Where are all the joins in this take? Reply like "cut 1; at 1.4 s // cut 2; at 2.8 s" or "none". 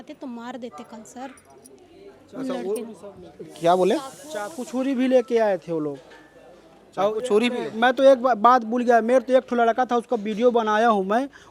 none